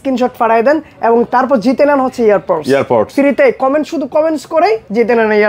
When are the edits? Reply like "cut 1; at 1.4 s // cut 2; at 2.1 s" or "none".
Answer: none